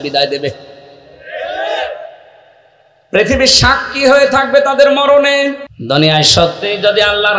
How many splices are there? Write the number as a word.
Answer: one